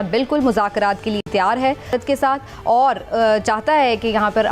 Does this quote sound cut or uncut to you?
uncut